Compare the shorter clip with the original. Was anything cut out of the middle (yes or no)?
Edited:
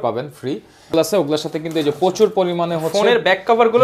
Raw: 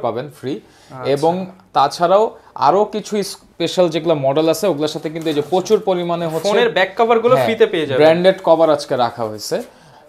yes